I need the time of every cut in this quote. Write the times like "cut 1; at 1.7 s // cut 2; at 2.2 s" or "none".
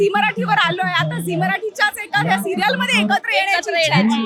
none